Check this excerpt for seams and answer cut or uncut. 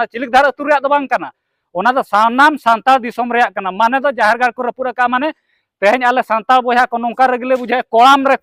uncut